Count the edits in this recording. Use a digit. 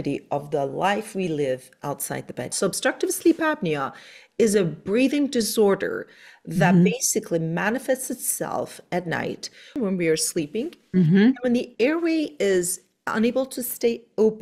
2